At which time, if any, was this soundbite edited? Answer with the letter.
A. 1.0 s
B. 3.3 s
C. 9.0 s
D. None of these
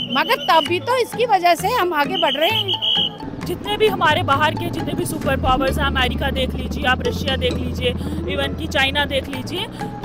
B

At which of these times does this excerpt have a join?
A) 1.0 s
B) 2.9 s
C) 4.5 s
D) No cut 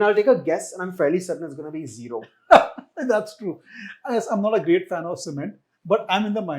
D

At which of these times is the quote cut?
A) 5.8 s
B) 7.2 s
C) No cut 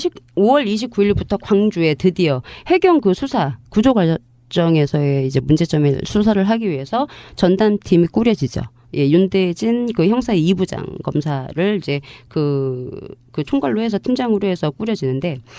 B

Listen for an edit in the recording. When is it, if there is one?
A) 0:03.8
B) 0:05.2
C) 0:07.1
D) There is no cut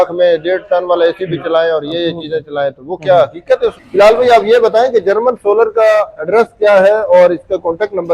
A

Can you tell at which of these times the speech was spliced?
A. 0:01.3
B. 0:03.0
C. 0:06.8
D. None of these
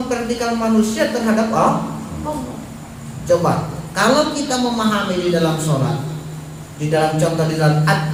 D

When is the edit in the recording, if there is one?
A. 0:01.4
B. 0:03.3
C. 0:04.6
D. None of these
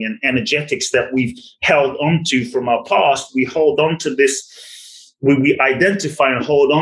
D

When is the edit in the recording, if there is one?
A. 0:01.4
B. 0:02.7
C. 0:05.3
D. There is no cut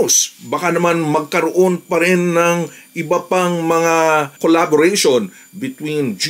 D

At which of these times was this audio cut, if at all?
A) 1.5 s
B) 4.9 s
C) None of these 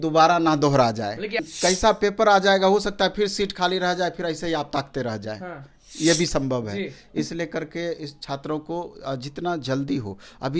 A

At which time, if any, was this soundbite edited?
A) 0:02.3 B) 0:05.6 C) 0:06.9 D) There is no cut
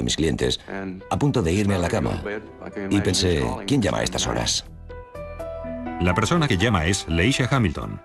B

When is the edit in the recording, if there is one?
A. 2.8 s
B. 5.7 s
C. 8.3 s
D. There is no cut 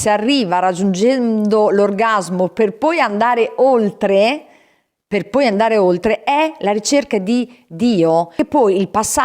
C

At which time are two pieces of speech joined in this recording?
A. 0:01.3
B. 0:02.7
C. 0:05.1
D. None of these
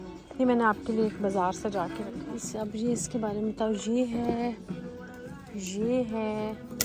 D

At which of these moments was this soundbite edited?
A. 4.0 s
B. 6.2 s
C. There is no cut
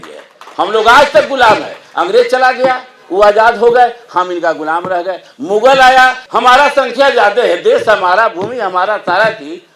B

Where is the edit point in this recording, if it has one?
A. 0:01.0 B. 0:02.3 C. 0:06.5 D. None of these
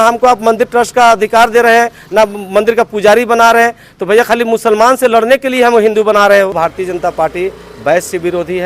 C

